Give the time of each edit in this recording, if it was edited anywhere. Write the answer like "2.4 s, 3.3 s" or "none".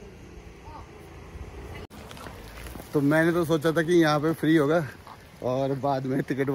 1.9 s